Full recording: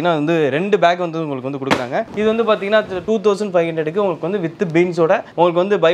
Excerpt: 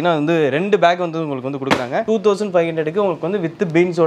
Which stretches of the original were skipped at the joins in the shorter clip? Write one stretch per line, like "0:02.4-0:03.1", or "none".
0:02.0-0:03.0